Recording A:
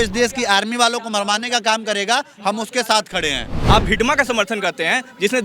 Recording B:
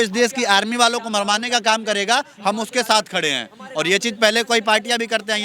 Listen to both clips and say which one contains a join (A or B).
A